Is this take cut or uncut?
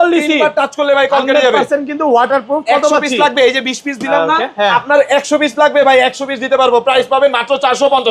uncut